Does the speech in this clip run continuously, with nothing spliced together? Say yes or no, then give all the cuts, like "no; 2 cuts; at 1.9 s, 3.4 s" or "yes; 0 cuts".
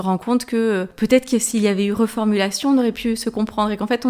no; 1 cut; at 0.9 s